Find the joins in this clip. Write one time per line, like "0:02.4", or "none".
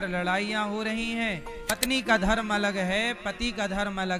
0:01.6